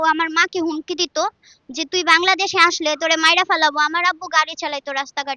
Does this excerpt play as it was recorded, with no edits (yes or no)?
yes